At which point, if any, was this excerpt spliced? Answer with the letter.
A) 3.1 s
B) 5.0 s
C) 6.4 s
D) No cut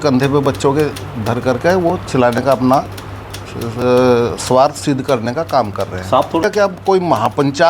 C